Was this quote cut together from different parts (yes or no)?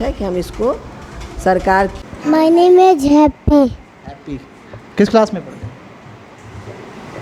yes